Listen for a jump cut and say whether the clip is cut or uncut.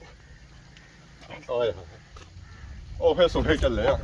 uncut